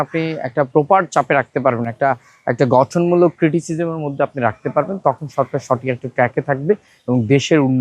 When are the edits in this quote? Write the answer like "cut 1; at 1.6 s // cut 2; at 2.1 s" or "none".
none